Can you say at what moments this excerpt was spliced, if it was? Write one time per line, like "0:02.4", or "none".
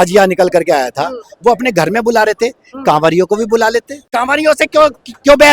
0:04.0